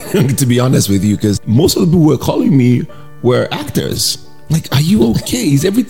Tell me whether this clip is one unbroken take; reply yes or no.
no